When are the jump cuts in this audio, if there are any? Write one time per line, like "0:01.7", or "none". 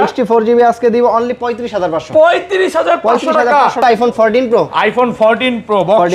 0:03.8